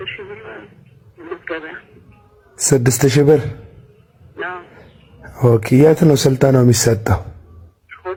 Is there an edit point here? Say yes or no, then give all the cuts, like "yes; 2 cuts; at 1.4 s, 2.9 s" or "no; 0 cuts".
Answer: no; 0 cuts